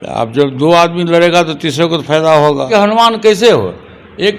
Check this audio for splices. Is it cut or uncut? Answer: cut